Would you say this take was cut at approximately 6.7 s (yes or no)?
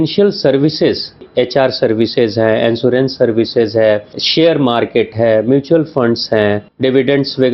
yes